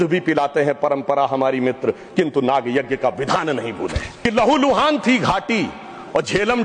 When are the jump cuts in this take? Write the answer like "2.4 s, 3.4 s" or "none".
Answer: 4.1 s